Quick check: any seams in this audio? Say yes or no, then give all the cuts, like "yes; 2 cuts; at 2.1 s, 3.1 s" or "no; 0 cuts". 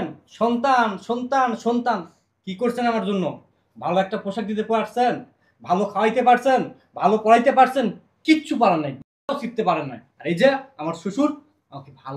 no; 0 cuts